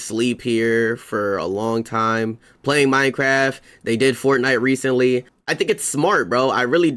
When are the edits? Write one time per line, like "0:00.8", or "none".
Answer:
0:05.4